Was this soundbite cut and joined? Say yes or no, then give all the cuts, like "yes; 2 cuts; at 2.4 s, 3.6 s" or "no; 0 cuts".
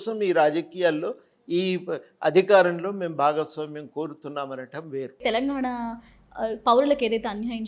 yes; 1 cut; at 5.2 s